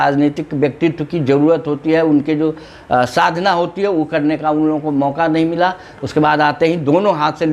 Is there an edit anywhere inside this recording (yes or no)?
no